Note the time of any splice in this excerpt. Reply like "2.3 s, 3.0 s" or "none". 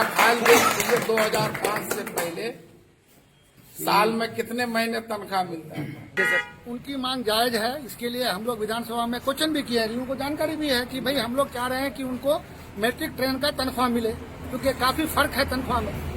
6.2 s